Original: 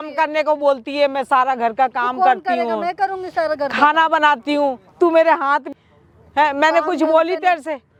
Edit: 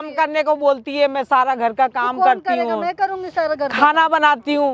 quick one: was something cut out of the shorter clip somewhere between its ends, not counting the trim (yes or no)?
no